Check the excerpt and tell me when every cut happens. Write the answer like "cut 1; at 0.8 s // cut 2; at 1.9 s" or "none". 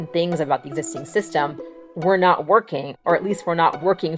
none